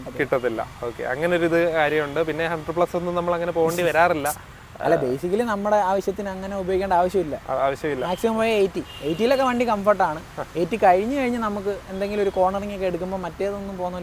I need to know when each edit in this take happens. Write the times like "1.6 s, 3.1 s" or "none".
none